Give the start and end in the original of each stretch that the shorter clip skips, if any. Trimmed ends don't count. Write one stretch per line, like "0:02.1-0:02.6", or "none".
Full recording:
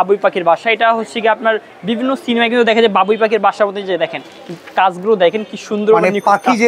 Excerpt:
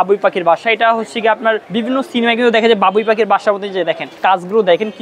0:01.6-0:01.8
0:04.2-0:04.6